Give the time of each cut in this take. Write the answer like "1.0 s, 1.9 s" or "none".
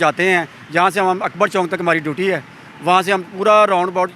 none